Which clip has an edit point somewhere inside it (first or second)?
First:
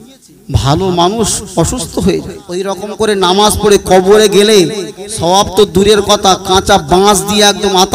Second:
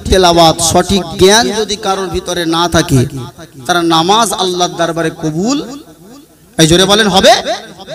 first